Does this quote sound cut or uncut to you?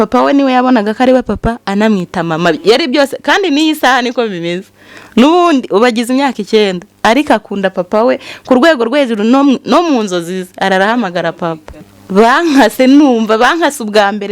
cut